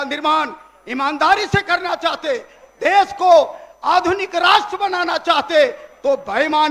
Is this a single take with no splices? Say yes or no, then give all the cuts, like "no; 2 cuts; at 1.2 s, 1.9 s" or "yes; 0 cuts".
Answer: yes; 0 cuts